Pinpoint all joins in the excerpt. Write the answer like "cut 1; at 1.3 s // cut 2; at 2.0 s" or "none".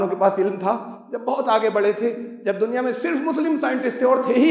none

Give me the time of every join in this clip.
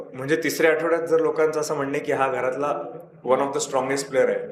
none

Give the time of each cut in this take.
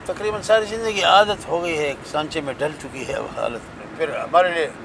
cut 1; at 3.8 s

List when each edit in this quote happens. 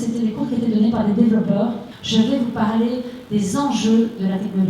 cut 1; at 1.9 s

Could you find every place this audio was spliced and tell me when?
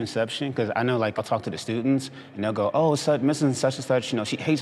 cut 1; at 1.2 s

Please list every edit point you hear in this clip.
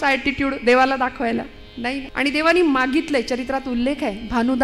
cut 1; at 2.1 s

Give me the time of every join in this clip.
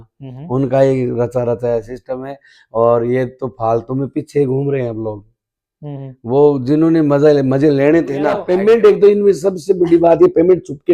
cut 1; at 8.4 s

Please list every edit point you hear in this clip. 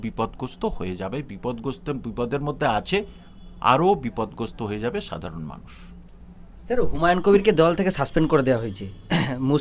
none

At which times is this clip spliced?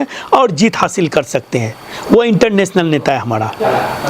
none

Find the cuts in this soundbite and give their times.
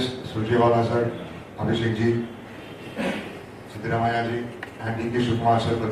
none

